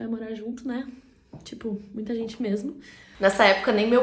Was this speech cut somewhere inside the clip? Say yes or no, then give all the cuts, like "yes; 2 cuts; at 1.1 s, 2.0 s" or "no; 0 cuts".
no; 0 cuts